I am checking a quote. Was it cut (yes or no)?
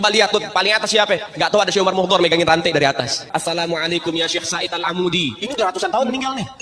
yes